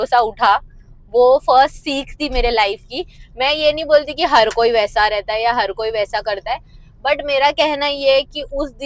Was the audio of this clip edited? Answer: no; 0 cuts

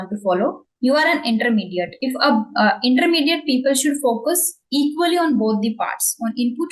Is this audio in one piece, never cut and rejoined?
yes; 0 cuts

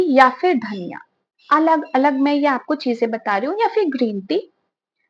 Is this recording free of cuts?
yes; 0 cuts

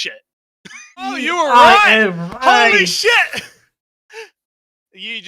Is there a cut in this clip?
yes; 1 cut; at 1.2 s

